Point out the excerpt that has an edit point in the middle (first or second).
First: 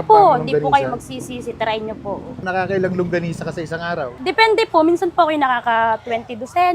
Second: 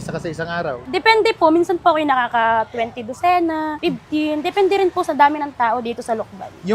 first